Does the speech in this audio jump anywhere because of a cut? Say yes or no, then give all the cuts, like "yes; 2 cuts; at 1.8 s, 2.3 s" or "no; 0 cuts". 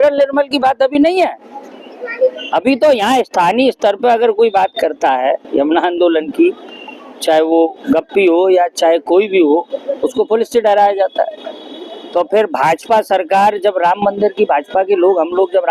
no; 0 cuts